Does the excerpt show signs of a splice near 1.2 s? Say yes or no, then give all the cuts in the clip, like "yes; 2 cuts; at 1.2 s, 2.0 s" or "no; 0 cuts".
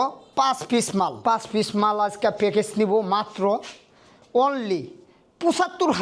yes; 1 cut; at 1.2 s